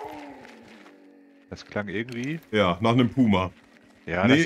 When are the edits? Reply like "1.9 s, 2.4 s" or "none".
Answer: none